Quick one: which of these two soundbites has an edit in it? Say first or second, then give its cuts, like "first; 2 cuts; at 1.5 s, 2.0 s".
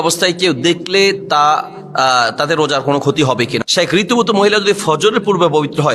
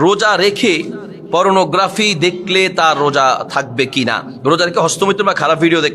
first; 1 cut; at 3.6 s